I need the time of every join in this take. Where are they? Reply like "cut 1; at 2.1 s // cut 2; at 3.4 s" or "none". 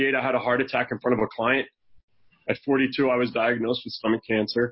none